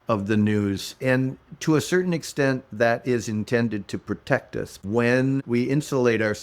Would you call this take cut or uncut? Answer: cut